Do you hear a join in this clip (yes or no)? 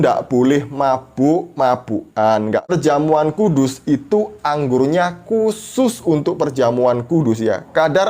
yes